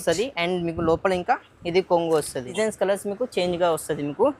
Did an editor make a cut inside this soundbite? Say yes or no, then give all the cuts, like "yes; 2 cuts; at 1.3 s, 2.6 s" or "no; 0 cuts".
yes; 1 cut; at 2.5 s